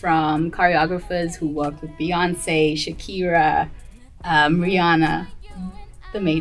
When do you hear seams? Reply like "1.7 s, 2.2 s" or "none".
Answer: none